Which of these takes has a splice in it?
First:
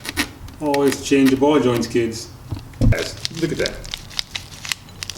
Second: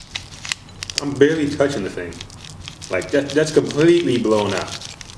first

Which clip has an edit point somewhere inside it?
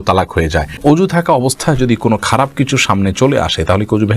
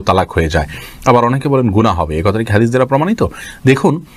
first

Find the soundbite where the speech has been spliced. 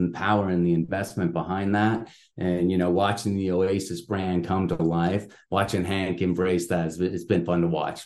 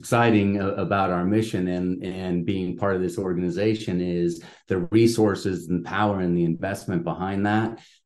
first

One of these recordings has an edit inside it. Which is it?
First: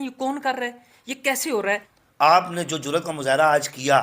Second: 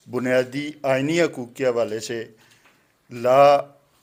first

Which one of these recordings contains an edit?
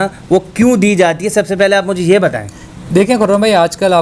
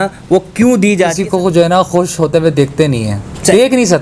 second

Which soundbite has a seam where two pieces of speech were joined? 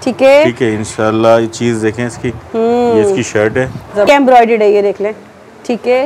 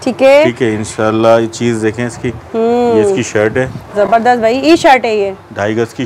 first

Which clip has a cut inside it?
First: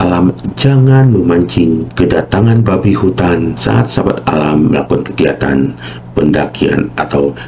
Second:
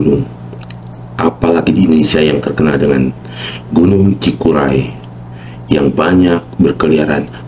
first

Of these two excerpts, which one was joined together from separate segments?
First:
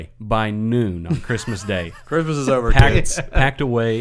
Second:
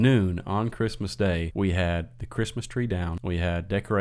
second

